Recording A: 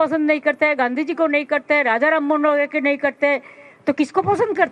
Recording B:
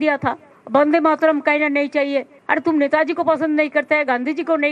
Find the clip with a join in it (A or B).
B